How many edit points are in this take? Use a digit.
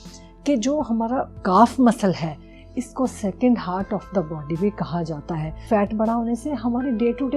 1